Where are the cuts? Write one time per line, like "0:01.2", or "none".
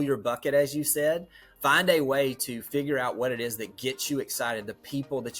0:01.4